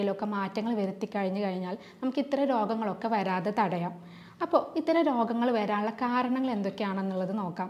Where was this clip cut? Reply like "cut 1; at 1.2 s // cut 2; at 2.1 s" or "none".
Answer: none